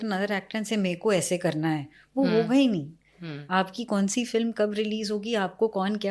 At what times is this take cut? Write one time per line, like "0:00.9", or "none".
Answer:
none